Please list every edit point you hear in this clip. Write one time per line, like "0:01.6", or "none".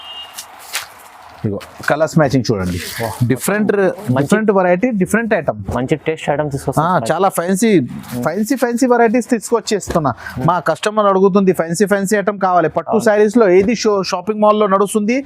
none